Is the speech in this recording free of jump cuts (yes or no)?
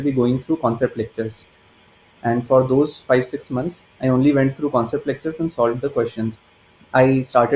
no